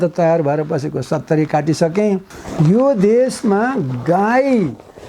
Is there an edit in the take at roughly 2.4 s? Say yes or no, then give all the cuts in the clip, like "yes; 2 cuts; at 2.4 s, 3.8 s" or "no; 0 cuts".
yes; 1 cut; at 2.4 s